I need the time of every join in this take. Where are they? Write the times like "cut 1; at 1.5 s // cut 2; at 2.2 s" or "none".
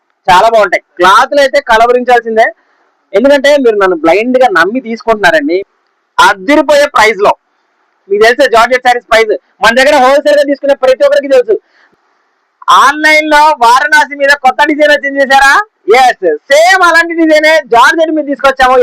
cut 1; at 5.6 s // cut 2; at 11.8 s